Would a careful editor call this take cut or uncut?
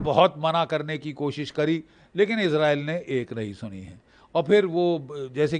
uncut